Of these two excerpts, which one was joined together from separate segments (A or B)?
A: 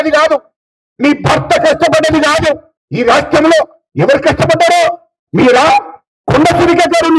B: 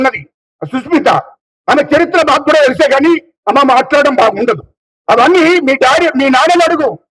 A